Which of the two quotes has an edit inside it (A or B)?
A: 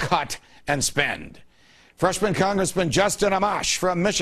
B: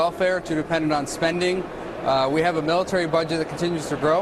B